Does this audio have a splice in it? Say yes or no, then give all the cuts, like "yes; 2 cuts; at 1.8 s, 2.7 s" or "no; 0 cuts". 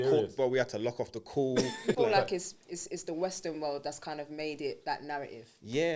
yes; 1 cut; at 1.9 s